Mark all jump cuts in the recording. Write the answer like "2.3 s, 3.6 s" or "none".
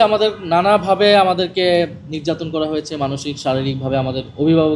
none